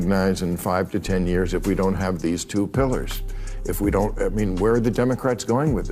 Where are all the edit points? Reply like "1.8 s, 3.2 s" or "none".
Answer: none